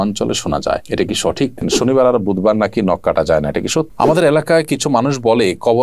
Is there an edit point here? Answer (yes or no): yes